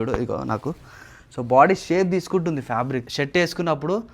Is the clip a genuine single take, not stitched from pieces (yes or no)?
no